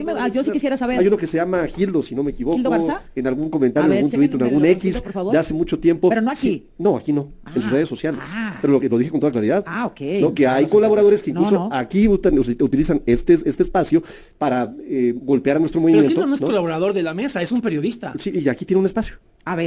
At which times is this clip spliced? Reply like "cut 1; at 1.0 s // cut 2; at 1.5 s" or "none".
none